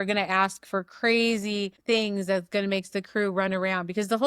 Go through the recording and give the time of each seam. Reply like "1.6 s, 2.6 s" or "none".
1.7 s